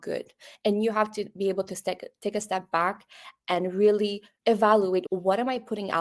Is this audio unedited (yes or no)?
no